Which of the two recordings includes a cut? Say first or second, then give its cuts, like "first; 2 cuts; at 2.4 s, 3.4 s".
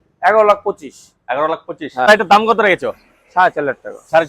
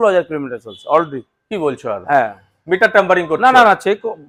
first; 1 cut; at 2.1 s